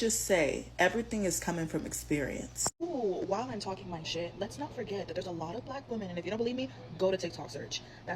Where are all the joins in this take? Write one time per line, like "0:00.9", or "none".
0:02.7